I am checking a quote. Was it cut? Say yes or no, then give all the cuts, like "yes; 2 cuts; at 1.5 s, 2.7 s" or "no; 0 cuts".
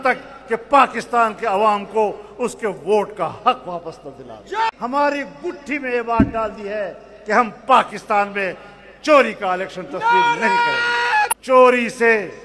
yes; 2 cuts; at 4.8 s, 11.4 s